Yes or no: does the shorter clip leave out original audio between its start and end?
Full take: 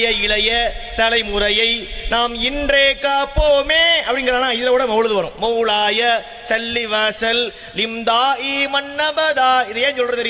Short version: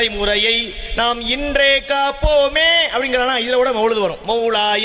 no